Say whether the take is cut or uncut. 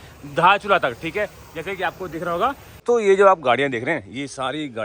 cut